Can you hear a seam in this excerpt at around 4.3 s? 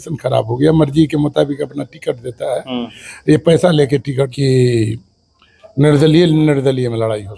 yes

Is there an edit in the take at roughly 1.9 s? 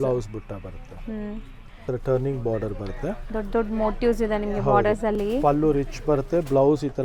yes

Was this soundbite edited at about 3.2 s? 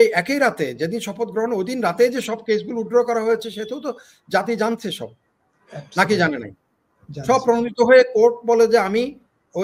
no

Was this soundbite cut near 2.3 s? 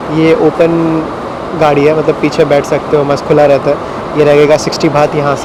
no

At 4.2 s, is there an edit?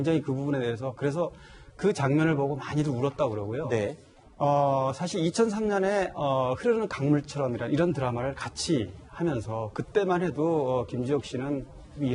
yes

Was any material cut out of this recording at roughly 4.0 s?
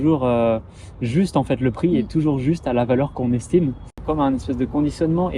yes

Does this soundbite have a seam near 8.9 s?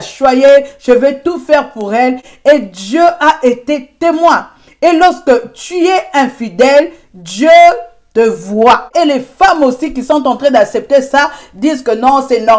yes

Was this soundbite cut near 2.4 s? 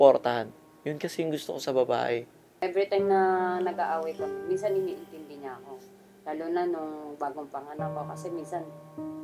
yes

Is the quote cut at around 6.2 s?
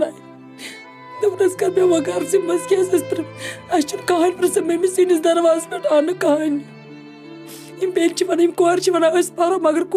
no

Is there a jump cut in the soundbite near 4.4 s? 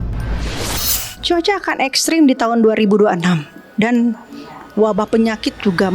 no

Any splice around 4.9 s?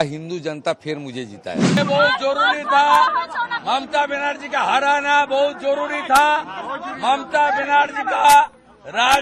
no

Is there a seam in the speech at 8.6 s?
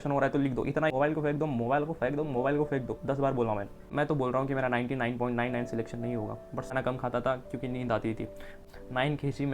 yes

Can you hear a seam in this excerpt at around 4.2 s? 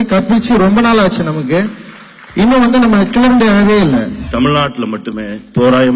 yes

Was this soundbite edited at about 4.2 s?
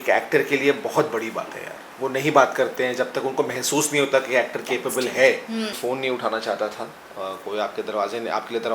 no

